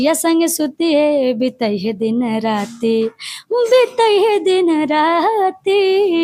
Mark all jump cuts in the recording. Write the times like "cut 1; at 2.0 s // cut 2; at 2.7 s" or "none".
none